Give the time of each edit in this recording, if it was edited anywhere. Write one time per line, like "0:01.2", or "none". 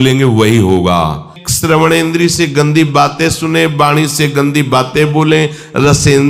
0:01.4

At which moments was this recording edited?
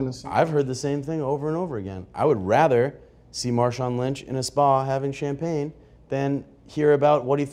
none

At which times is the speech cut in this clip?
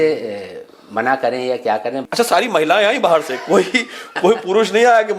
0:02.0

